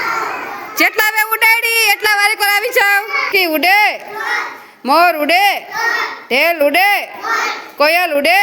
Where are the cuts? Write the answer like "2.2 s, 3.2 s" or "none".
3.3 s